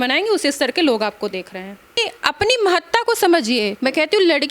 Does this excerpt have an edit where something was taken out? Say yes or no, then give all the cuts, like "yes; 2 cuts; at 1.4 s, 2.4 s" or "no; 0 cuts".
yes; 1 cut; at 2.0 s